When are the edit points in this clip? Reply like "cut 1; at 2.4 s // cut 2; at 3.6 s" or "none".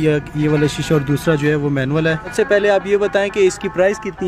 cut 1; at 2.3 s